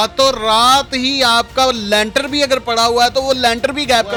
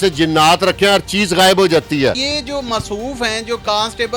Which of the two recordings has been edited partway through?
second; 1 cut; at 2.3 s

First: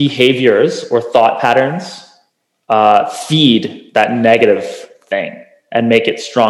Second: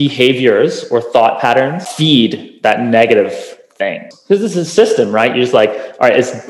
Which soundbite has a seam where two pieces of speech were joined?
second; 2 cuts; at 1.9 s, 4.1 s

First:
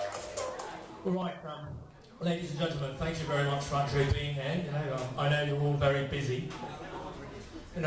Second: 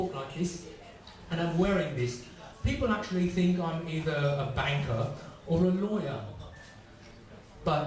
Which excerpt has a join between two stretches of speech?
second; 1 cut; at 6.5 s

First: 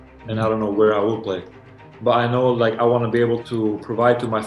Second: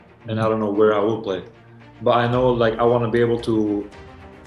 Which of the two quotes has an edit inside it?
first; 1 cut; at 3.4 s

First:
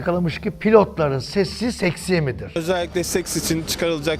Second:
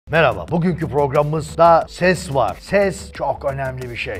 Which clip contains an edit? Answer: first; 1 cut; at 2.6 s

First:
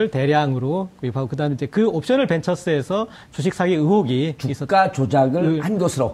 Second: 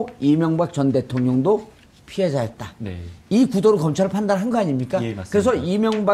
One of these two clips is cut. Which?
second; 1 cut; at 2.2 s

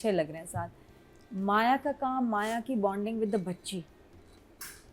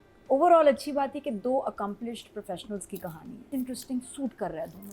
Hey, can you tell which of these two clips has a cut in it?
second; 1 cut; at 3.5 s

